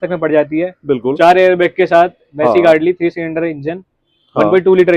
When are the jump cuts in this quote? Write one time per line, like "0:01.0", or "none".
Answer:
none